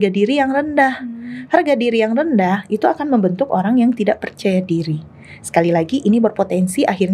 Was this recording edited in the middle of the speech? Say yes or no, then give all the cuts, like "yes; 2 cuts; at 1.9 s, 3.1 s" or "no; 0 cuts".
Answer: no; 0 cuts